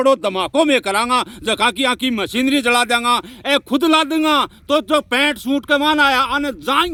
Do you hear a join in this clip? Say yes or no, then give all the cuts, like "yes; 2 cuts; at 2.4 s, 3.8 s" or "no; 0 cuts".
no; 0 cuts